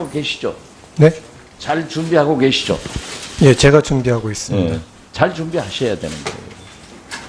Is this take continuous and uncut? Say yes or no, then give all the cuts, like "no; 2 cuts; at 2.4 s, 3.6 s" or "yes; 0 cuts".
yes; 0 cuts